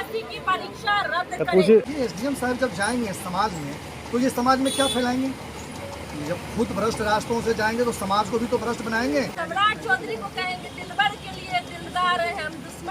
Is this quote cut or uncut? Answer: cut